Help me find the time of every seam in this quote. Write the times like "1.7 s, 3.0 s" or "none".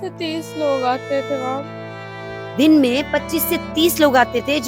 none